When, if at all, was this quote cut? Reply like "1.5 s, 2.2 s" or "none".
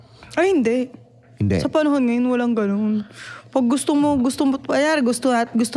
none

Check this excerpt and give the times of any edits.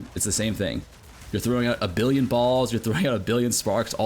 none

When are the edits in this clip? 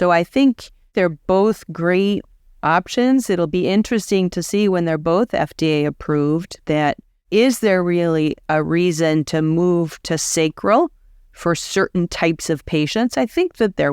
0.9 s

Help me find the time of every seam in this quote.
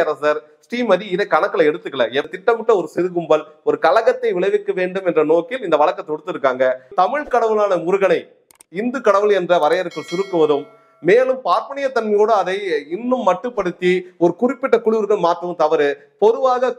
2.3 s, 6.9 s

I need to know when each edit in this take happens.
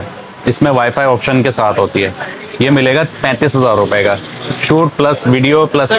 none

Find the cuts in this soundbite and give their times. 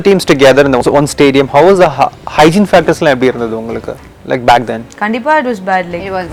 none

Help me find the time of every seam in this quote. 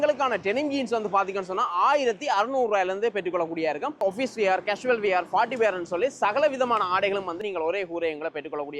4.0 s

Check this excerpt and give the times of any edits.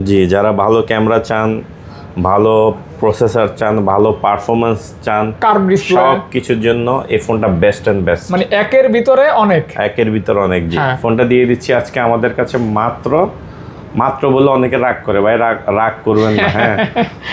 none

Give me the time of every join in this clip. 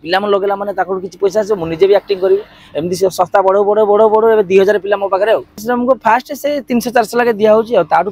5.5 s

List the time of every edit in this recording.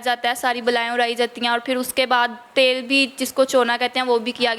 none

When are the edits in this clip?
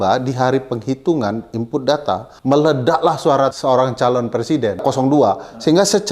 2.3 s, 3.6 s, 4.8 s

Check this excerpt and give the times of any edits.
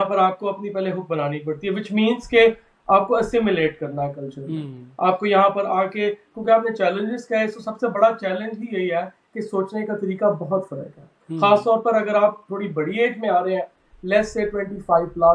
none

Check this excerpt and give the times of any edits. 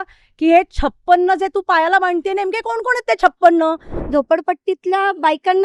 4.0 s

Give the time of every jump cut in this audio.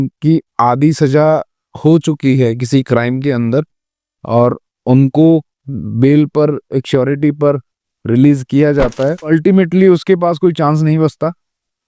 9.3 s

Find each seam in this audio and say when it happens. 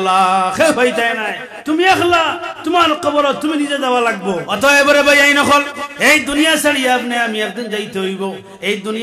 4.5 s

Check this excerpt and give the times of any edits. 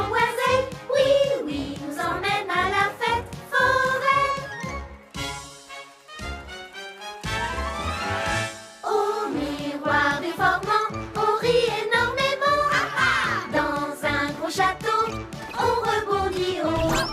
3.1 s

